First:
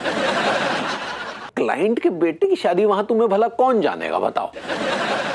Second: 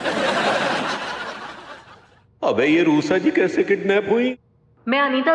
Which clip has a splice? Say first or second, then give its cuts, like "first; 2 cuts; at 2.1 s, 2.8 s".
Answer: first; 1 cut; at 1.5 s